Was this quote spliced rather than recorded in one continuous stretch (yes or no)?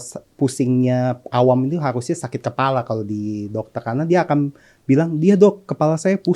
no